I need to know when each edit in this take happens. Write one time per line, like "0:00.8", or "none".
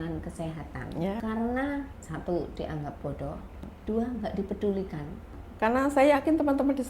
0:01.2
0:02.0
0:03.6
0:05.4

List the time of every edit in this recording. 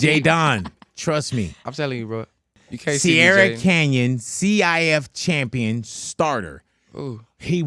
0:02.6

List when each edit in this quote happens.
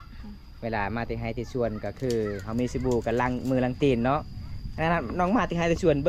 none

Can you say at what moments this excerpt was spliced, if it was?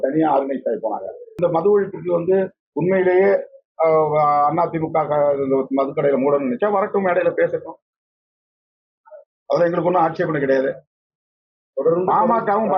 0:01.4

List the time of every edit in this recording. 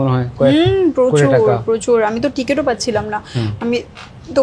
none

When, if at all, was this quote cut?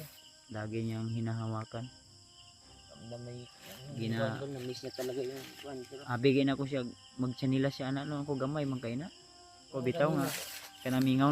0:09.7

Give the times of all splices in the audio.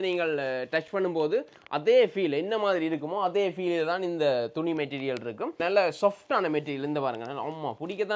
none

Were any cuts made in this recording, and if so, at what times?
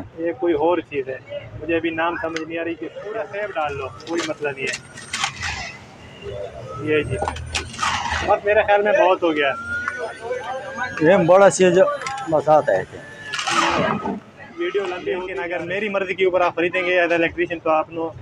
0:03.0
0:15.4

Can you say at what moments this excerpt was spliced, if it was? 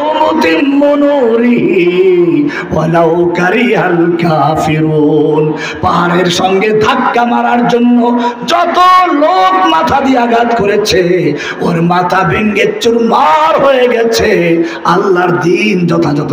none

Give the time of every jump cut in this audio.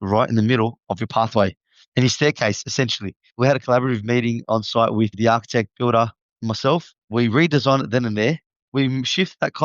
0:08.5

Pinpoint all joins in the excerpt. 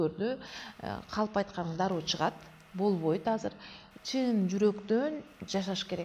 none

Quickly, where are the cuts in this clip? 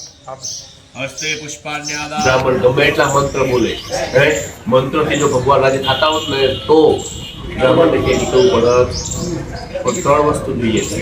0:02.3

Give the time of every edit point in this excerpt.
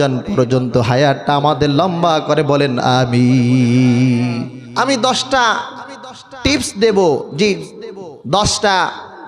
0:04.6

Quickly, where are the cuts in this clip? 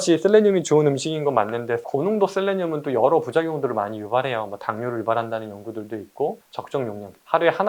0:06.4

